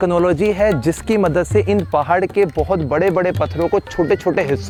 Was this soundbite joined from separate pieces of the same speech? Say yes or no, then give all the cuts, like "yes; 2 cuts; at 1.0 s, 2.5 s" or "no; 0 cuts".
no; 0 cuts